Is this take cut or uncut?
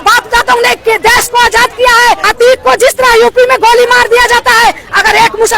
cut